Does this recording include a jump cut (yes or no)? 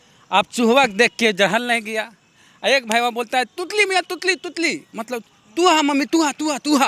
no